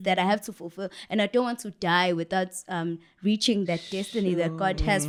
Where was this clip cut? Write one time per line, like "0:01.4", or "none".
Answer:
none